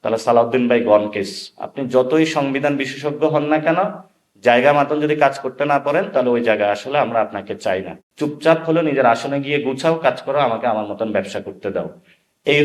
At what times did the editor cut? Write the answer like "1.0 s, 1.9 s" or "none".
7.9 s